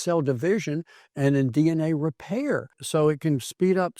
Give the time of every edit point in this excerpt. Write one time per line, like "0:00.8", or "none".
0:02.7